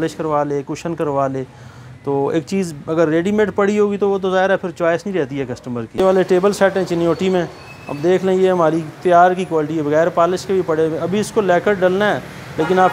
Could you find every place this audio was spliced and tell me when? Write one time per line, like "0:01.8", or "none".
0:06.0